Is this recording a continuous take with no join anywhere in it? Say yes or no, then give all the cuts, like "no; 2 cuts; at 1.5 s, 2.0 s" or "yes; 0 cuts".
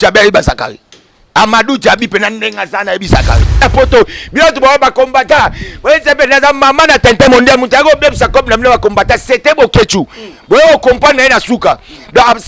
no; 1 cut; at 3.6 s